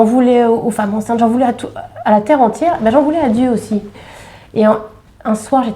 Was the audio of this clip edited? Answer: yes; 1 cut; at 3.9 s

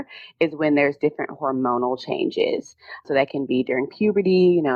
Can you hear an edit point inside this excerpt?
no; 0 cuts

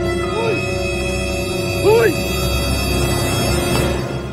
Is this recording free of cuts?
yes; 0 cuts

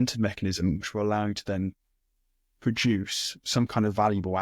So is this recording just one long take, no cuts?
yes; 0 cuts

